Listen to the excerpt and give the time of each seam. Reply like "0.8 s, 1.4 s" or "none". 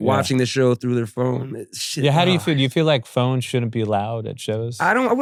none